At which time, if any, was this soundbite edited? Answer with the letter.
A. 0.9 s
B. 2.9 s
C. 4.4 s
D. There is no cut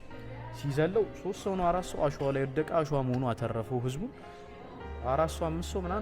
D